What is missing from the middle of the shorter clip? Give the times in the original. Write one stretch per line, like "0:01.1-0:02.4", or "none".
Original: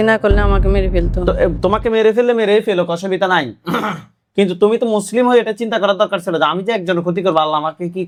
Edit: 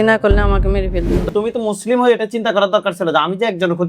0:01.2-0:04.5

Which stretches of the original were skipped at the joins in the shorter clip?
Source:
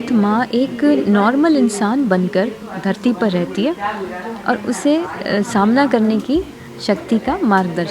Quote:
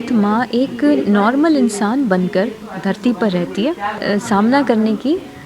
0:04.0-0:05.2

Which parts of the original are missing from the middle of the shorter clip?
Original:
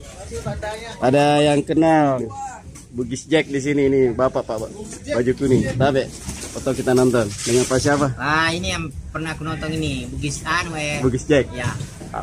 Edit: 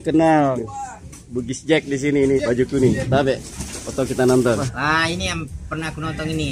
0:04.0-0:05.1
0:07.4-0:08.1

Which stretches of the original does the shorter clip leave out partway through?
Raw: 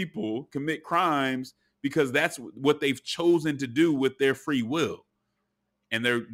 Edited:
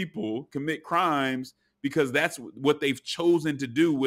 none

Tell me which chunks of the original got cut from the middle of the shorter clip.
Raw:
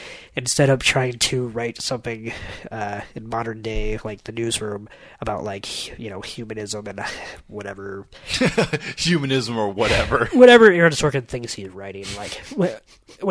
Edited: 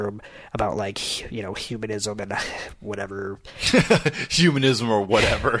none

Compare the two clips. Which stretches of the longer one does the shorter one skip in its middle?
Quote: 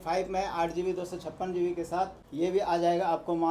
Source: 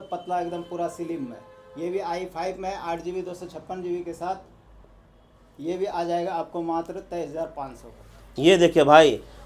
0:04.5-0:05.5

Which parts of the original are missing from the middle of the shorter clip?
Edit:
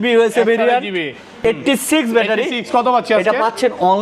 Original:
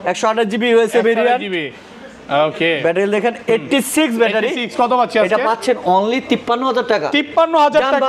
0:01.9-0:03.4

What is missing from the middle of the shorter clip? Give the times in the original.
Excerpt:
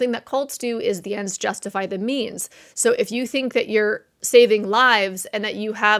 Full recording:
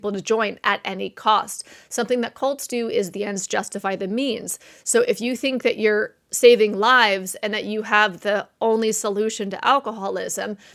none

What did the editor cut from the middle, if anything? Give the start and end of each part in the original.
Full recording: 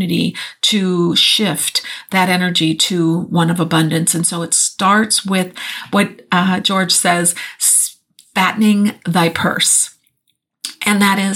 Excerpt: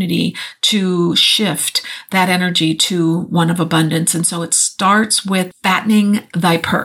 0:05.5-0:08.3

